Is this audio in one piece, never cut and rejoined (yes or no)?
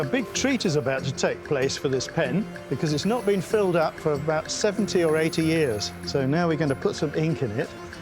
no